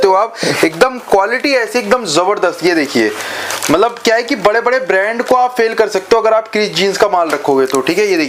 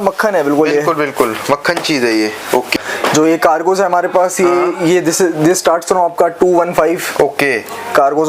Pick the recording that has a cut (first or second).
second